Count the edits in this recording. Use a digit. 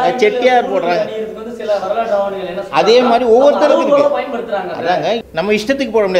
1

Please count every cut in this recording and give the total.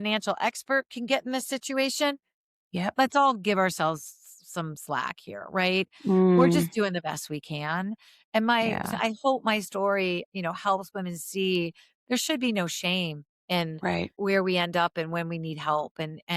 2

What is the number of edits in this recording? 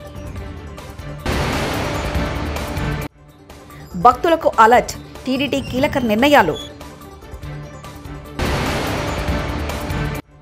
2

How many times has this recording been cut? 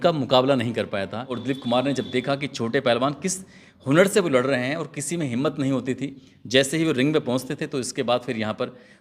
1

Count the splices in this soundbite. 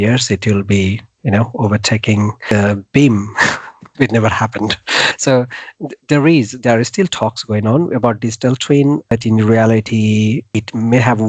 4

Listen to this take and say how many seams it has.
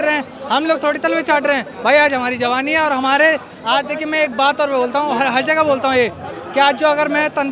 0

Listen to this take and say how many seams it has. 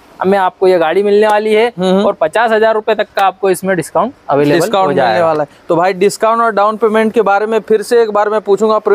0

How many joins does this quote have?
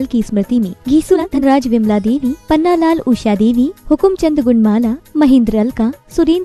1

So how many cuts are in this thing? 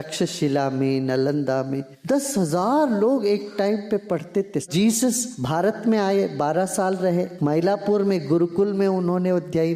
4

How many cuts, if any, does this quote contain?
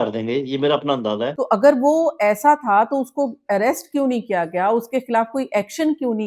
1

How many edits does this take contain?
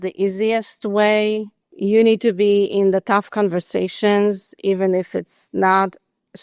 1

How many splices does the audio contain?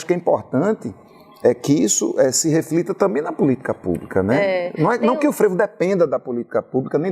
0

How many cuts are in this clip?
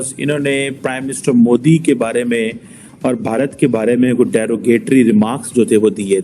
0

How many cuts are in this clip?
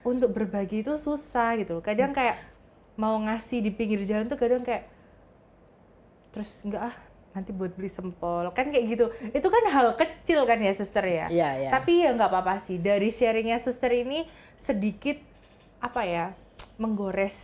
0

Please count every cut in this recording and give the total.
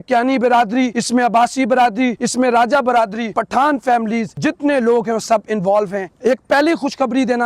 5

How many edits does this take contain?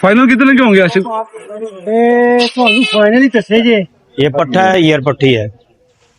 1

